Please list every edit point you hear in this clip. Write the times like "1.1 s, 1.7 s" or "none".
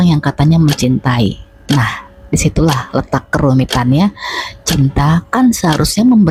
none